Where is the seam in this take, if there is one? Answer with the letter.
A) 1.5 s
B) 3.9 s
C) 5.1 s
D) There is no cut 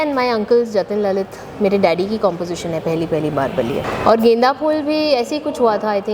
B